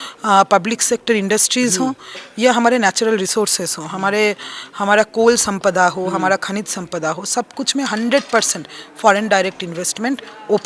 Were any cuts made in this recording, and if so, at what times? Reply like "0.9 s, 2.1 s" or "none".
none